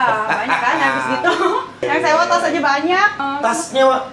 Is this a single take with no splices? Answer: no; 2 cuts; at 1.8 s, 3.2 s

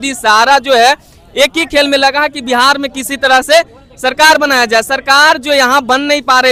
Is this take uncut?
yes; 0 cuts

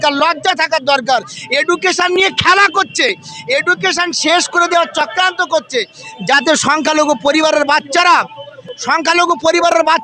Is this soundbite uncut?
yes; 0 cuts

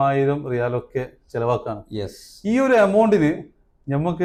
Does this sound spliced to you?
no; 0 cuts

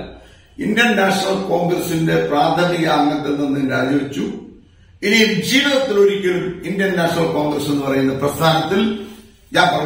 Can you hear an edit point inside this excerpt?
no; 0 cuts

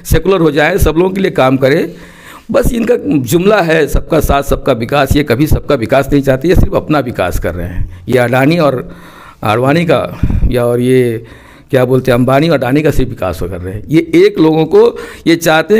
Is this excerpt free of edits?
yes; 0 cuts

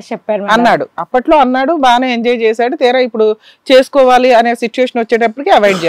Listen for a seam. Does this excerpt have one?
no; 0 cuts

